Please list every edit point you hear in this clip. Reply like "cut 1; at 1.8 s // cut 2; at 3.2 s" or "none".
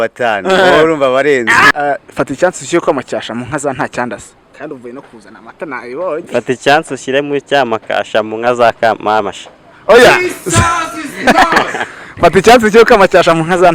cut 1; at 1.7 s